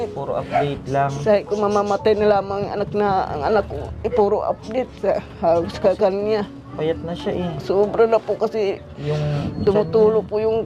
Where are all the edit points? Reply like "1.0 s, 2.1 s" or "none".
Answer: none